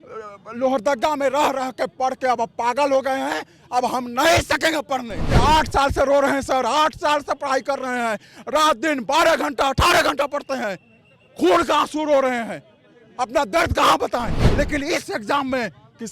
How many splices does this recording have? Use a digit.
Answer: 2